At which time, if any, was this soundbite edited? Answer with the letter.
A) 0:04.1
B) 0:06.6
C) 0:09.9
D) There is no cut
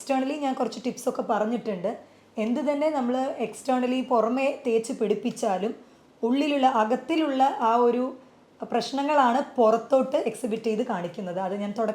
D